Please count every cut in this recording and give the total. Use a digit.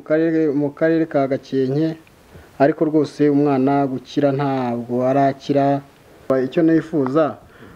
1